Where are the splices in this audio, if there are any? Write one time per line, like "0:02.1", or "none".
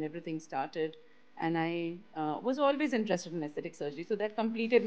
none